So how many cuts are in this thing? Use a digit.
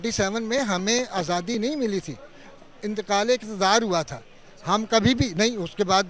0